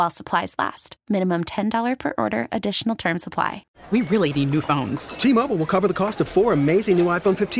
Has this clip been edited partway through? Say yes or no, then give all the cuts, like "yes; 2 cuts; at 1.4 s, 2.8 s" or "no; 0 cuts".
yes; 1 cut; at 3.7 s